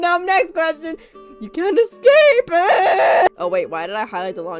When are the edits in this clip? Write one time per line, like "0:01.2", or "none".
0:03.3

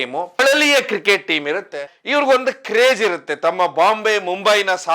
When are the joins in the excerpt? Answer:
0:01.9

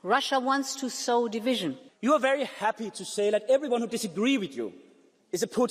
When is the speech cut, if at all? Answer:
0:01.9

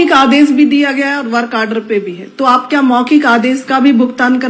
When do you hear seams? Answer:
none

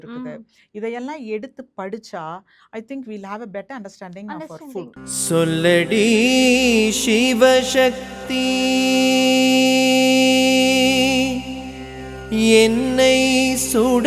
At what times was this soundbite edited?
0:04.9

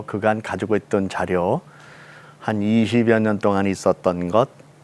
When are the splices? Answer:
none

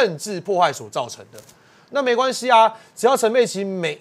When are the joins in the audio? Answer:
none

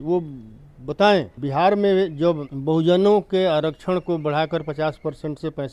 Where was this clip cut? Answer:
0:01.4
0:02.5

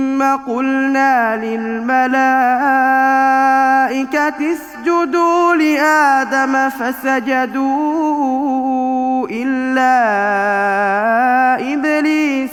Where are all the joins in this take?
none

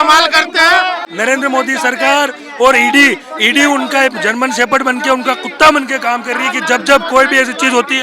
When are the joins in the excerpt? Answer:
0:01.1

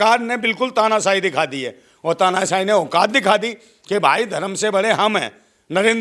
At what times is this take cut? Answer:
none

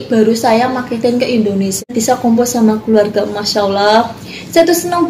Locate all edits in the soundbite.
0:01.9

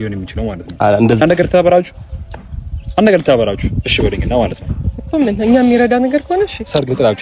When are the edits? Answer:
0:01.2

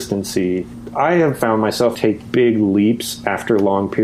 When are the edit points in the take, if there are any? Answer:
0:01.9

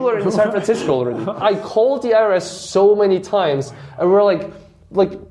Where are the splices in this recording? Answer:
0:01.4

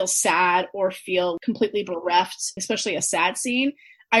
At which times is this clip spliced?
0:01.4
0:02.6

